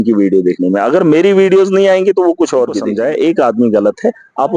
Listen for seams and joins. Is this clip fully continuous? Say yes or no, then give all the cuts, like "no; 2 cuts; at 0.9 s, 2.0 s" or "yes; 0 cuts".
no; 1 cut; at 2.9 s